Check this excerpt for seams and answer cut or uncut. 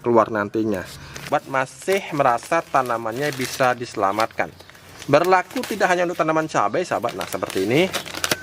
cut